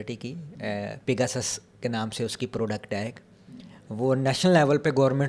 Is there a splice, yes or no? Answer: no